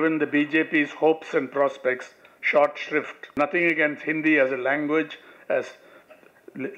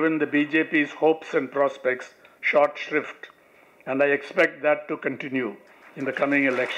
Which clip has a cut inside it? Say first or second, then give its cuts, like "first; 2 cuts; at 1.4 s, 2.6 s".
first; 1 cut; at 3.3 s